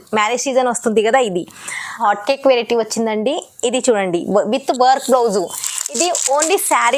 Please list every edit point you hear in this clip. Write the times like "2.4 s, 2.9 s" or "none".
2.0 s